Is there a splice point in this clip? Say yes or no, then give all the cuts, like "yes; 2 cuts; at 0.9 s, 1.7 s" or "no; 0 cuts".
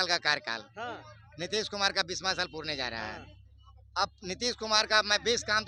no; 0 cuts